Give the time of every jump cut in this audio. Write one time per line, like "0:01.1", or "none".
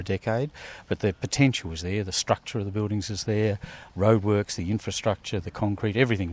0:03.8

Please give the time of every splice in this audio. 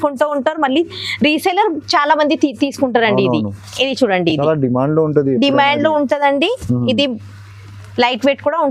none

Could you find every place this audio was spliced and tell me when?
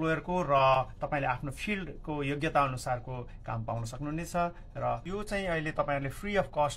0:04.6

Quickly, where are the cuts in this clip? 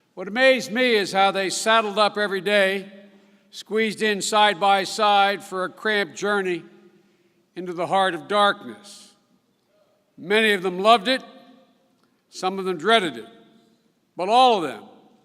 0:01.4

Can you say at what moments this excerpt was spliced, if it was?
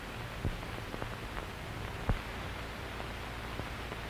0:02.4

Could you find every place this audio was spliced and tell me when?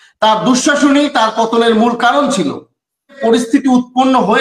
0:03.2

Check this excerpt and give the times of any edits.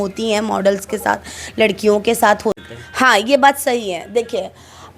0:02.6

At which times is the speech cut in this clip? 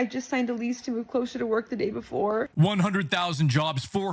0:02.5

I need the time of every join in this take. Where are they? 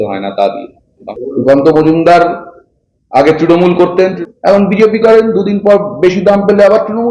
0:01.0
0:04.2

